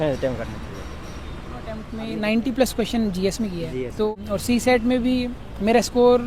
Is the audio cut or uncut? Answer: cut